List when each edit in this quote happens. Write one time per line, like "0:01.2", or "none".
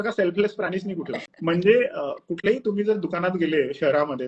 0:01.2